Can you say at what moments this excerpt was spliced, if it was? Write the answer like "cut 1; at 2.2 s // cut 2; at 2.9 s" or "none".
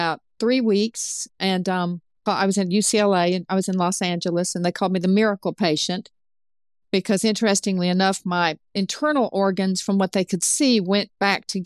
cut 1; at 2.2 s